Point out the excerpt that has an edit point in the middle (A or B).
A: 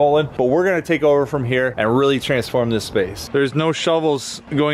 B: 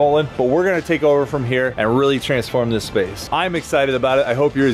A